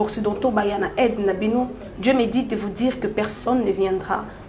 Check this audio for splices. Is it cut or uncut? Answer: uncut